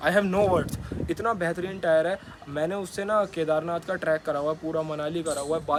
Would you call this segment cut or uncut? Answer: uncut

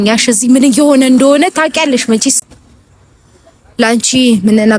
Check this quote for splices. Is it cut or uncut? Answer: uncut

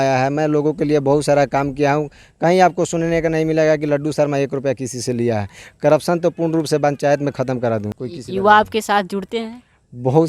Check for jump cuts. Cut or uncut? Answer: uncut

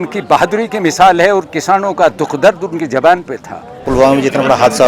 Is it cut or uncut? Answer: cut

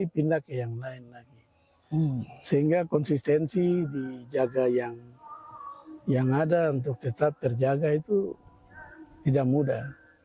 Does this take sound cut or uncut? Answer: uncut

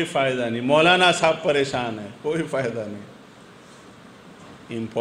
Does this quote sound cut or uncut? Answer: uncut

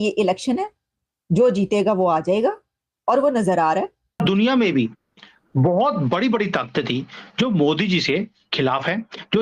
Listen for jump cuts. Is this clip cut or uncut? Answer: cut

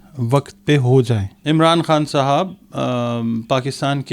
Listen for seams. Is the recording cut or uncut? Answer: cut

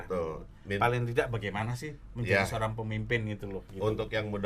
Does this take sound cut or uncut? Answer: uncut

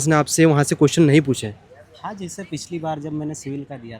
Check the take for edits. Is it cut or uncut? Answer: uncut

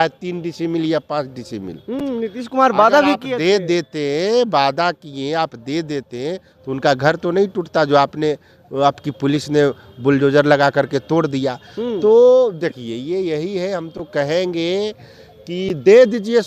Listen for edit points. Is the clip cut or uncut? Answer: uncut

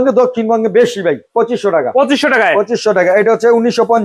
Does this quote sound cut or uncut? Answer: cut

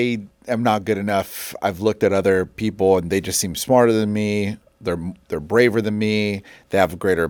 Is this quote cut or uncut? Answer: uncut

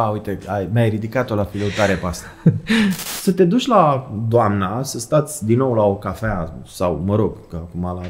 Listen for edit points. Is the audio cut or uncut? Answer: cut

